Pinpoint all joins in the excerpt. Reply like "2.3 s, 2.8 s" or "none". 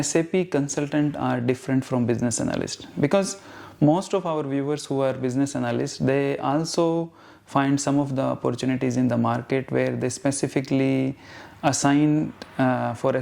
none